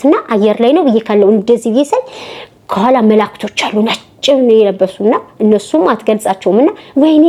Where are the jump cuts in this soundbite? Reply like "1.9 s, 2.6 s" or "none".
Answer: none